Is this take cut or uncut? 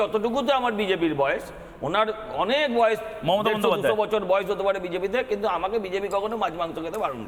uncut